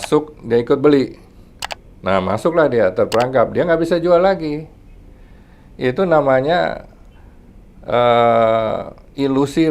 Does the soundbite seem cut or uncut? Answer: uncut